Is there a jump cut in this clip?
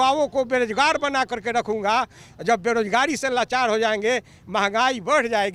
no; 0 cuts

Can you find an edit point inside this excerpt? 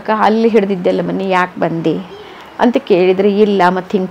no; 0 cuts

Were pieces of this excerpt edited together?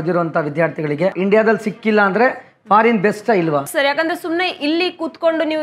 yes; 2 cuts; at 1.2 s, 3.7 s

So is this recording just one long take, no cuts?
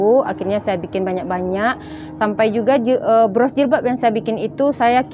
yes; 0 cuts

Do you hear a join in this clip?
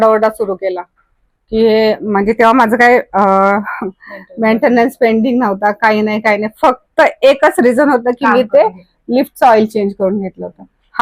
no; 0 cuts

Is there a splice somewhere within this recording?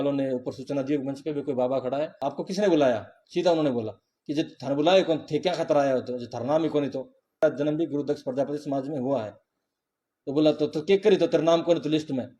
yes; 2 cuts; at 2.2 s, 7.4 s

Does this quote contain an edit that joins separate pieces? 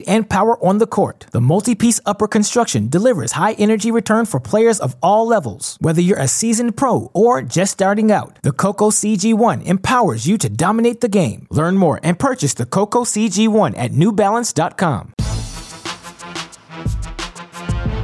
yes; 1 cut; at 15.1 s

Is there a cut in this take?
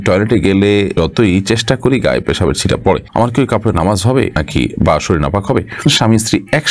yes; 4 cuts; at 1.0 s, 3.1 s, 4.4 s, 5.9 s

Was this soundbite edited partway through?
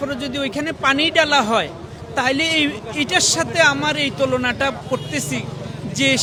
no; 0 cuts

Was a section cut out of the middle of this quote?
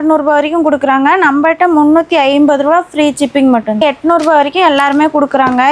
yes; 1 cut; at 3.8 s

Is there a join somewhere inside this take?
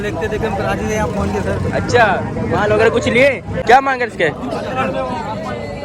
yes; 1 cut; at 3.6 s

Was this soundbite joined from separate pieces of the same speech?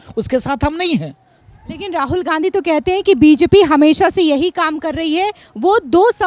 no; 0 cuts

